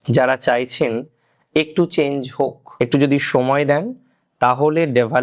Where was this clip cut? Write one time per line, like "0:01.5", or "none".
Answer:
0:02.6